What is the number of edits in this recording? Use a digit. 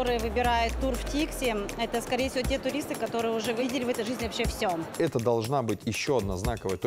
2